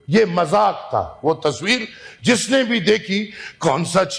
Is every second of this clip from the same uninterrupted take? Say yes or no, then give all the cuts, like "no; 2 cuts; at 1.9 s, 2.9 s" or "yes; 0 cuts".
yes; 0 cuts